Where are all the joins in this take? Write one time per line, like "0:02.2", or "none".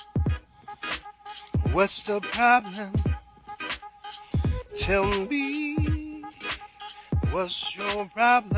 0:01.6

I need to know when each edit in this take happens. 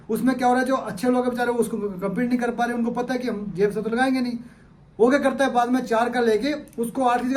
none

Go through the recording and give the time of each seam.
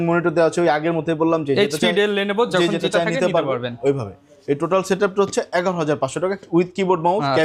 none

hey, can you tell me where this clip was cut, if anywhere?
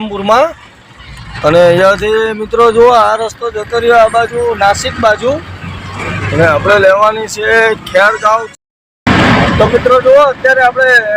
0:08.6

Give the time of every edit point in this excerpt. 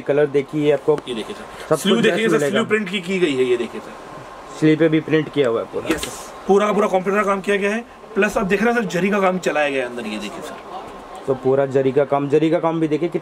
0:06.4

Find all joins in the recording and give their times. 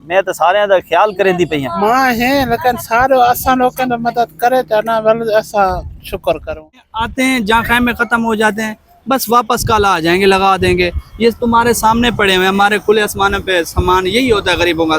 0:06.9

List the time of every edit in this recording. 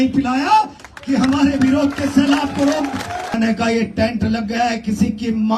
0:03.4

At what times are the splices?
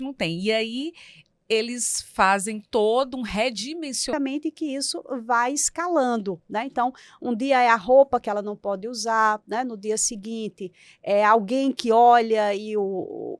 0:04.1

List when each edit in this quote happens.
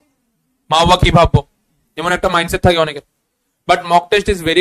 none

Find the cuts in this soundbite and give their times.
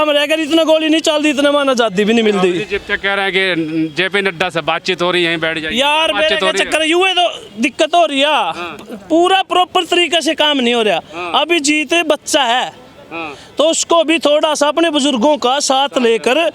none

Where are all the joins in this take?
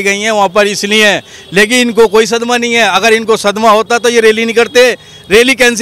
none

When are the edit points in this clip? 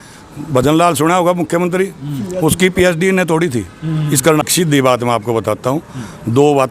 0:04.4

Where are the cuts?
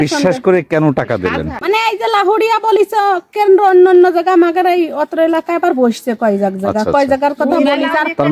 0:01.5

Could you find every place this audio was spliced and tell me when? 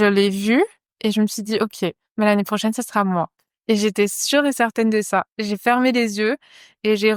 none

